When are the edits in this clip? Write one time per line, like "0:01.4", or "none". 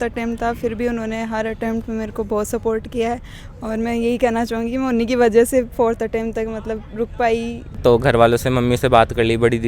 0:07.8